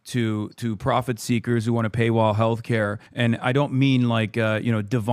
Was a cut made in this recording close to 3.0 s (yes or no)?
yes